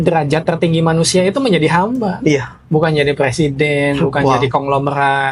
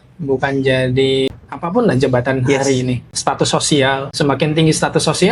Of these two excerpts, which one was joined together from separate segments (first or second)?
second